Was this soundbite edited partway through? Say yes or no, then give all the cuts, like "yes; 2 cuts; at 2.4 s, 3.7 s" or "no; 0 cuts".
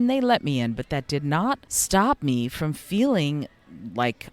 yes; 1 cut; at 1.7 s